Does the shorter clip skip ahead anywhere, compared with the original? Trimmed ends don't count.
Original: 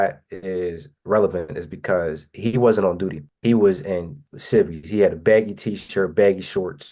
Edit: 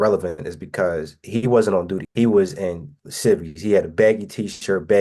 yes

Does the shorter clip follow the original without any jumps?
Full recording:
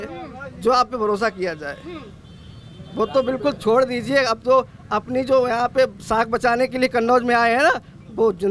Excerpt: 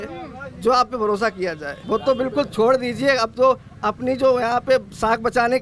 no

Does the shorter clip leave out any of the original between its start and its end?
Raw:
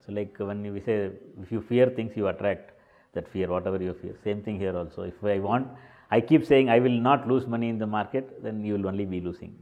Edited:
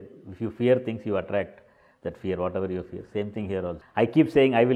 yes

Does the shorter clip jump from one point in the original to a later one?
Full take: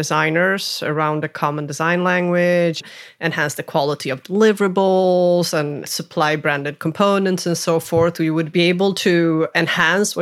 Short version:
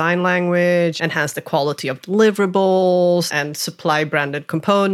yes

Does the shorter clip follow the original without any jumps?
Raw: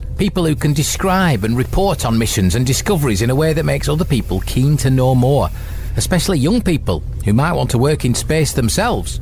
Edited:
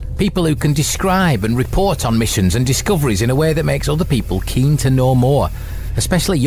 yes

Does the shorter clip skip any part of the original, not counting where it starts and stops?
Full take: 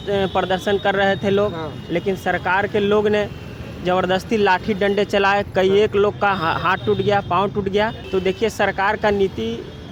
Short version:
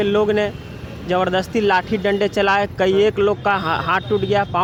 no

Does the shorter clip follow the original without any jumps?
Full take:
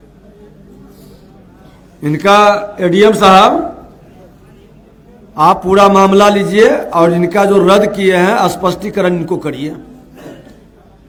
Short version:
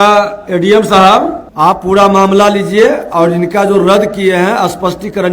no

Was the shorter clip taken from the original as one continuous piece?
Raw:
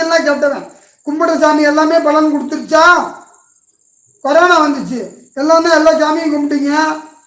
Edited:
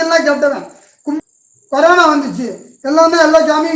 no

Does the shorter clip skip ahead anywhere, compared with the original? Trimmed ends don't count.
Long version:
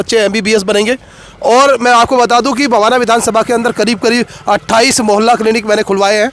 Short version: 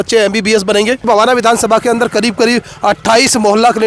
yes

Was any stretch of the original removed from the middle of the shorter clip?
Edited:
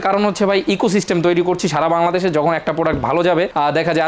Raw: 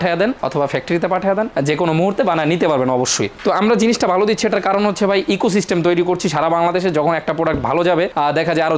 no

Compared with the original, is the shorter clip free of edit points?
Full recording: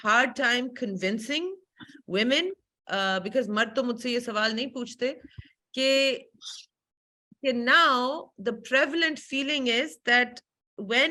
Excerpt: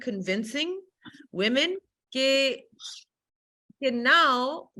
no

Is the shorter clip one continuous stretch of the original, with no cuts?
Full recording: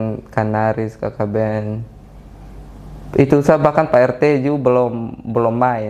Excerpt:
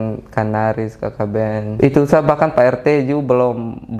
no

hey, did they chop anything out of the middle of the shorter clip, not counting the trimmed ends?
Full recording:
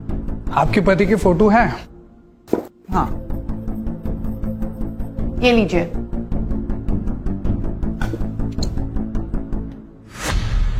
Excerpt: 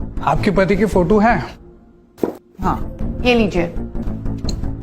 yes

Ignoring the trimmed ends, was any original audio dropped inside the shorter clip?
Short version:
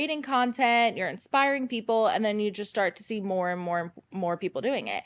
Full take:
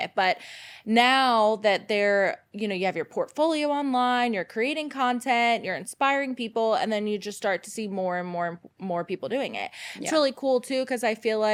no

